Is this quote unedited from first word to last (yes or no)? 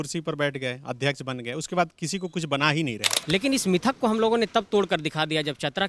no